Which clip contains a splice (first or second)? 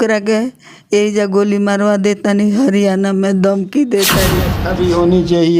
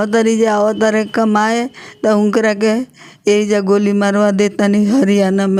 first